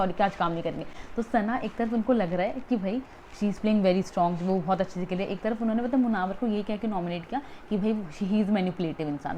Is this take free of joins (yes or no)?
yes